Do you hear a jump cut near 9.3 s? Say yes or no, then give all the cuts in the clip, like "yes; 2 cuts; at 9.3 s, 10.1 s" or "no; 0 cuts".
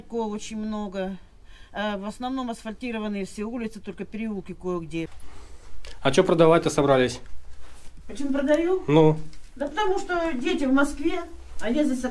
no; 1 cut; at 5.1 s